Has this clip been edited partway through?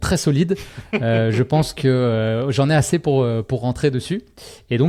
no; 0 cuts

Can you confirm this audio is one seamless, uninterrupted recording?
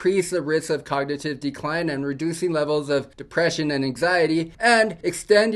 yes; 0 cuts

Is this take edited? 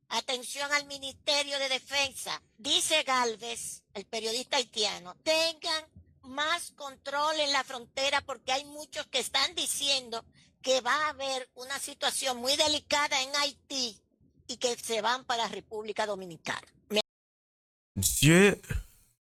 no; 0 cuts

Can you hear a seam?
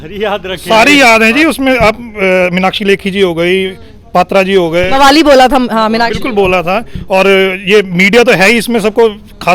no; 0 cuts

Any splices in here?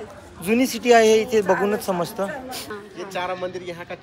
yes; 1 cut; at 2.7 s

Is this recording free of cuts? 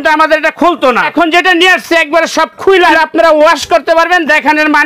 no; 2 cuts; at 1.0 s, 2.9 s

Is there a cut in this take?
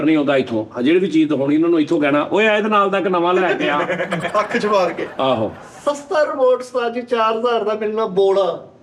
no; 0 cuts

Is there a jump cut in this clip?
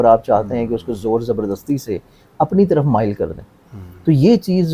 no; 0 cuts

